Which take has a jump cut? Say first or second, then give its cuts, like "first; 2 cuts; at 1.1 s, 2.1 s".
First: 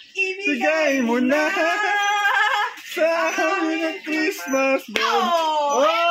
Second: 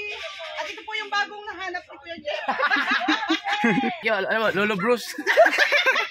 second; 1 cut; at 4.0 s